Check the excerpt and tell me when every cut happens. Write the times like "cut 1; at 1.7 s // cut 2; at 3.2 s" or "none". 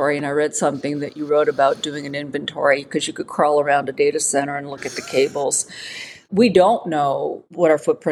none